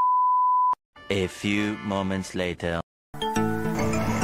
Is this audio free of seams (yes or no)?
no